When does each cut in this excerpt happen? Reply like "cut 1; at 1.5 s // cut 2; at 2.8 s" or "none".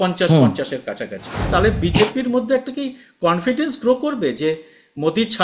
cut 1; at 1.4 s